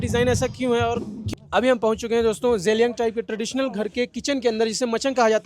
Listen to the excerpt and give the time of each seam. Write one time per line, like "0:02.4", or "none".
0:01.2